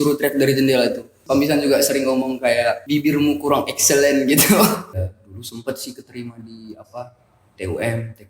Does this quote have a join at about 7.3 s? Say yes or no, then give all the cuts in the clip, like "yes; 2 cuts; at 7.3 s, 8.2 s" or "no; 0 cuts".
no; 3 cuts; at 1.2 s, 2.8 s, 4.9 s